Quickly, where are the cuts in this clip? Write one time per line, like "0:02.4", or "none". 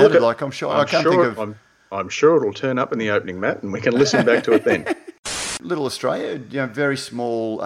0:05.4